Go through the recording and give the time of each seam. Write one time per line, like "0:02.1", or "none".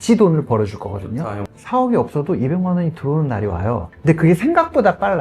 0:01.2
0:03.9

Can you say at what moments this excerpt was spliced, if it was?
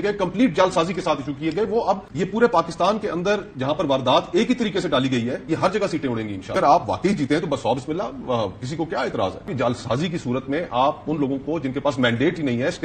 0:02.1
0:06.5
0:09.5

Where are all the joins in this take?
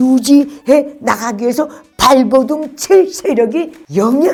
none

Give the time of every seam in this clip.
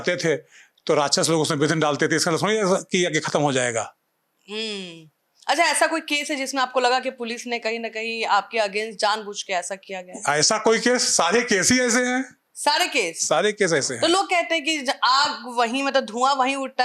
none

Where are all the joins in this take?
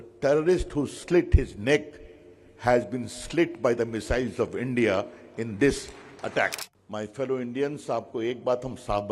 0:06.7

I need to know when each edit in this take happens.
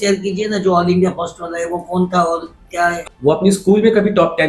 0:03.0

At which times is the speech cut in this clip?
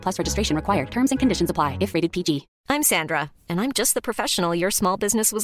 0:02.5

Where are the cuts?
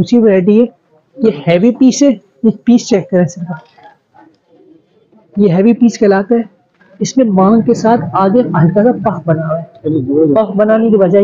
none

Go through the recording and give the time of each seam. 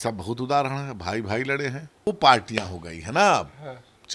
0:02.1

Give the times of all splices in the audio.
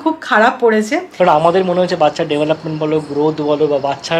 0:01.1

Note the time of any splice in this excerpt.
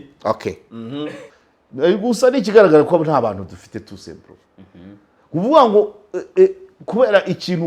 0:01.2

